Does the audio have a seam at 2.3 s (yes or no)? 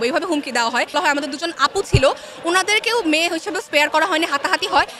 no